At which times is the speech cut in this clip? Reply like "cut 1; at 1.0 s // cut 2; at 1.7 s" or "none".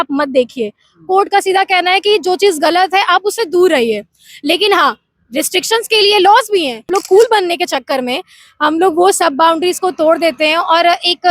cut 1; at 6.9 s